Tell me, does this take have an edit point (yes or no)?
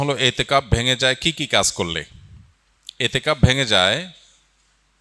no